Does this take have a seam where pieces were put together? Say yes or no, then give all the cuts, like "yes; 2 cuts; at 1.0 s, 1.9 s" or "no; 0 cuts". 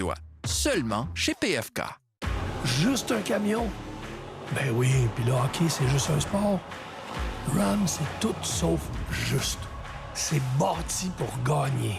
yes; 1 cut; at 2.2 s